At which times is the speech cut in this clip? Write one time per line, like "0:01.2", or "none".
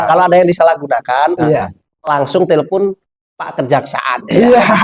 none